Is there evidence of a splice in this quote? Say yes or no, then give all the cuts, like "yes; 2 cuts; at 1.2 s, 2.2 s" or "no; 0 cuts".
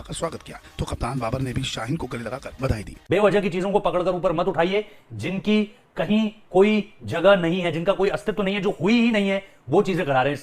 yes; 1 cut; at 2.9 s